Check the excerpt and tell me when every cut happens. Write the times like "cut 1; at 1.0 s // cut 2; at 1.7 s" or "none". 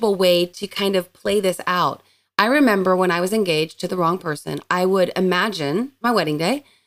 cut 1; at 5.9 s